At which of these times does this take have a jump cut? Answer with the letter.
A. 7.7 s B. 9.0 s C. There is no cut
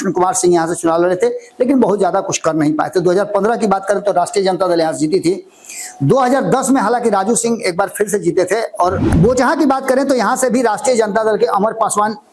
B